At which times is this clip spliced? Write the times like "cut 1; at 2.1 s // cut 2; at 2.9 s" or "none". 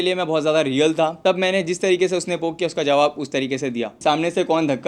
cut 1; at 1.2 s // cut 2; at 4.0 s